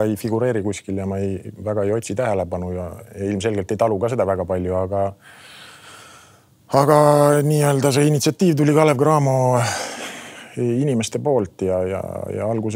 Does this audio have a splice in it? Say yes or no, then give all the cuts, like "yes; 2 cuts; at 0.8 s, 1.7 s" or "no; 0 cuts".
no; 0 cuts